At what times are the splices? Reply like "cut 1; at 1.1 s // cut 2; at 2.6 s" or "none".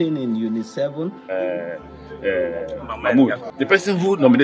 cut 1; at 1.3 s // cut 2; at 3.5 s